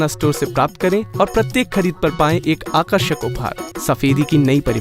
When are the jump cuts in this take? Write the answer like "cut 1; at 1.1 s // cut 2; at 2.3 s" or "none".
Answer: cut 1; at 3.6 s